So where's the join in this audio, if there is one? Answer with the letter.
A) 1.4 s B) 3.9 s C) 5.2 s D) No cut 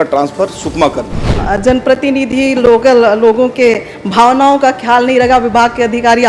A